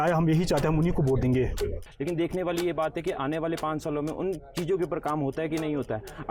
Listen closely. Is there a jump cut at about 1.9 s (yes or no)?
yes